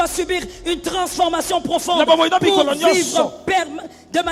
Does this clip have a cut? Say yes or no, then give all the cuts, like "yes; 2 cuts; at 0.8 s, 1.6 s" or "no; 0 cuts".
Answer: no; 0 cuts